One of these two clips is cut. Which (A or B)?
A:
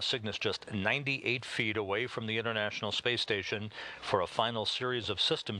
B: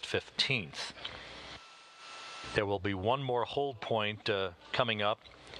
A